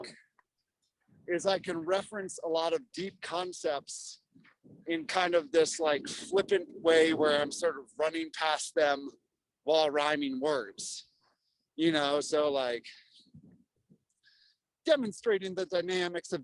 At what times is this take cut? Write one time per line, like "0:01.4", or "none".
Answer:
none